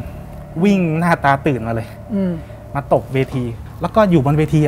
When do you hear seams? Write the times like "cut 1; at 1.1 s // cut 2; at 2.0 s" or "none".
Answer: cut 1; at 3.6 s